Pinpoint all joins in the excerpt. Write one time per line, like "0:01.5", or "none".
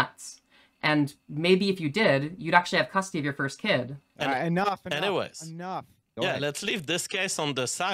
0:04.1